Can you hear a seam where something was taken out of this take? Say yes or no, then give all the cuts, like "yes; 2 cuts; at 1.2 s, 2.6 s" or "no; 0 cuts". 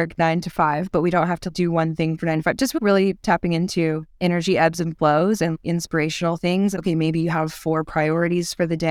yes; 4 cuts; at 1.5 s, 2.8 s, 5.5 s, 6.8 s